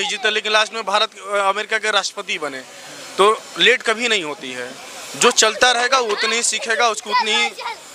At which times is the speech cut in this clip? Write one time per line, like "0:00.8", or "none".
none

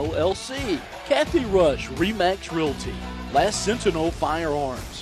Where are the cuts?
0:00.9

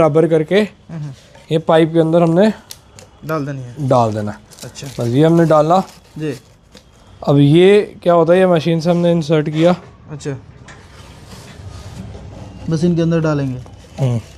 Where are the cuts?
none

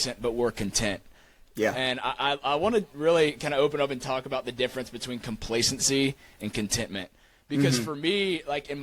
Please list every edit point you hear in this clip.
none

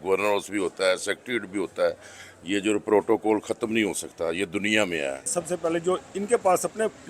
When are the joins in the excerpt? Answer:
0:05.3

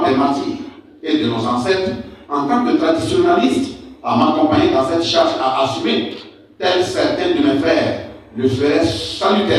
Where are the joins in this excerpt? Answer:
none

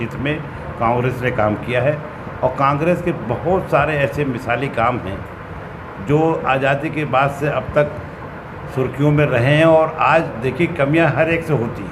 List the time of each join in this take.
none

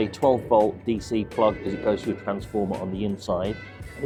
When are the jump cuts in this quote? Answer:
none

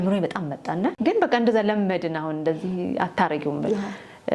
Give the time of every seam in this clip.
0:01.0

